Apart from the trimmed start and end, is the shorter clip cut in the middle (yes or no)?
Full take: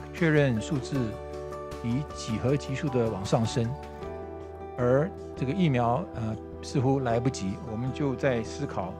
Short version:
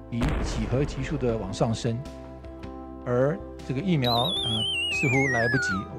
no